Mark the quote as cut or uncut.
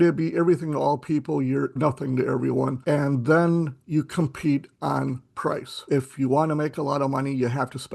cut